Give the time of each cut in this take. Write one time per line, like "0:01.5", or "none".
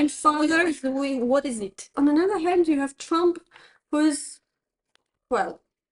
0:01.9